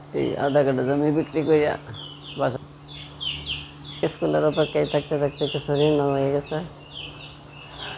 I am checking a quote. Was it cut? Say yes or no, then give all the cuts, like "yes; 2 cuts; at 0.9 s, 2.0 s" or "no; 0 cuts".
yes; 1 cut; at 2.5 s